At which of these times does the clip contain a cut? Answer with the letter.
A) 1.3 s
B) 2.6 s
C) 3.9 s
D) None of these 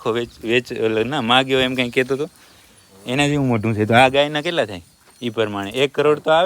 D